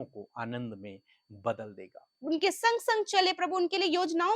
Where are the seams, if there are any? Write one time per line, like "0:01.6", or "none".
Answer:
0:02.2